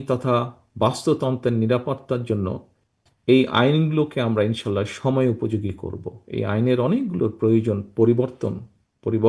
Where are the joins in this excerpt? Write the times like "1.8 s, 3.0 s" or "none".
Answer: none